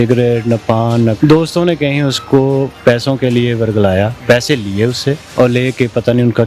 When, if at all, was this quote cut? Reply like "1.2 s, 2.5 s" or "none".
1.2 s, 2.7 s, 4.2 s, 5.2 s

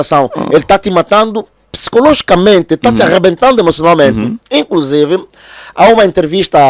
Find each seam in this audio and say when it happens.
none

